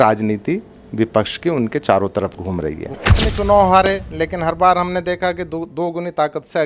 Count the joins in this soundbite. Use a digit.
1